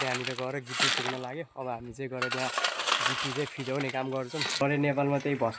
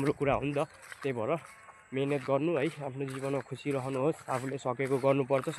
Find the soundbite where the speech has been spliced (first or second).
first